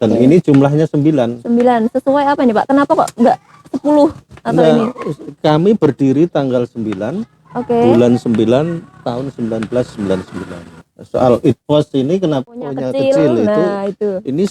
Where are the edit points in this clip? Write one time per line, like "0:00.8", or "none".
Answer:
0:10.8
0:12.5